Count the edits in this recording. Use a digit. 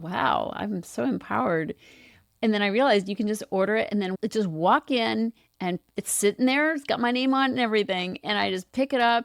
1